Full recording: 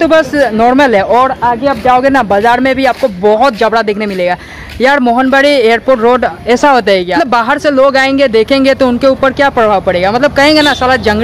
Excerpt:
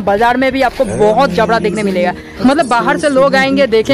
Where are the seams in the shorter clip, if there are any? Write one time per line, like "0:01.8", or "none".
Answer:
0:02.5